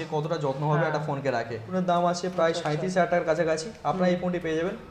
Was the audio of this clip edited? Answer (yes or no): yes